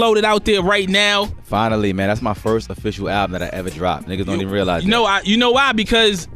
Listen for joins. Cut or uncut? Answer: cut